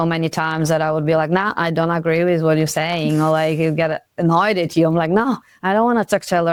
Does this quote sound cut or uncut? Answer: uncut